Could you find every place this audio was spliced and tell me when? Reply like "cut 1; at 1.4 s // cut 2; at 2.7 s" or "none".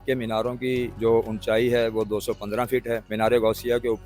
cut 1; at 0.9 s // cut 2; at 3.1 s